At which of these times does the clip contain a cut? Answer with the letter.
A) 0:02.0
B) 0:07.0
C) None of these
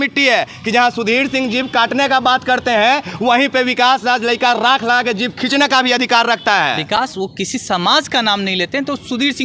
C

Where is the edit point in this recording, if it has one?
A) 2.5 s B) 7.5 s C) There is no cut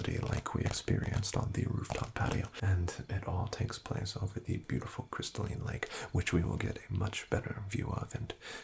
A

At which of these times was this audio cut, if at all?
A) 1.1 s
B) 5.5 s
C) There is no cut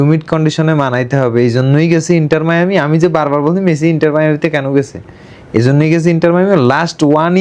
C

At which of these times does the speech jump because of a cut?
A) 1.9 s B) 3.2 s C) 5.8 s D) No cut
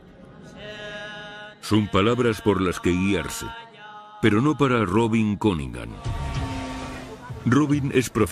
C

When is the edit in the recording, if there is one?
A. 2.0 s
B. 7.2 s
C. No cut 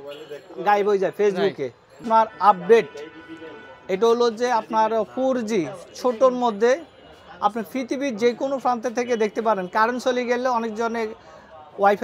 A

